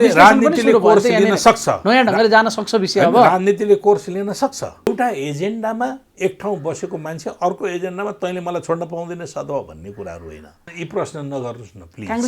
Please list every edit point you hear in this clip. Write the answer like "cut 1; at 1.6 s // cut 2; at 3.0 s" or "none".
cut 1; at 4.9 s // cut 2; at 10.7 s